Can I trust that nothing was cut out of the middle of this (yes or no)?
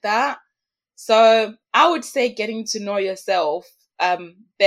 yes